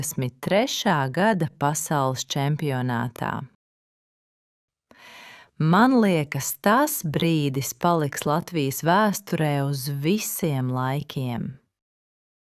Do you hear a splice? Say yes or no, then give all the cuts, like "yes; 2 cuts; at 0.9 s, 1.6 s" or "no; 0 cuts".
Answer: no; 0 cuts